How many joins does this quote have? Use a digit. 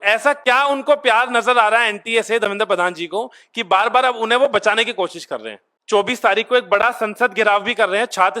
1